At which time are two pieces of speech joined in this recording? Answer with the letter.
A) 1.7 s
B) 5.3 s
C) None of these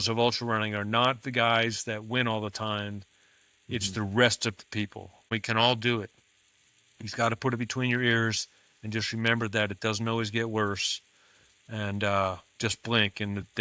B